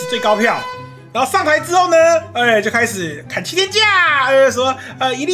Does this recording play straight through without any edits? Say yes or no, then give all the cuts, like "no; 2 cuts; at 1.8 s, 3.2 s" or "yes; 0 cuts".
yes; 0 cuts